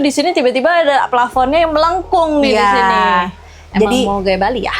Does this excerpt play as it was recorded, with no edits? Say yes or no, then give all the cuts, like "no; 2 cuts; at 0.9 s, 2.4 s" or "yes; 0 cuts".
yes; 0 cuts